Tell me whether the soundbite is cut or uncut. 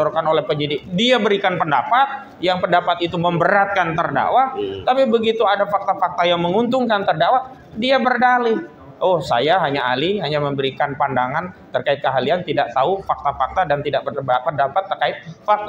uncut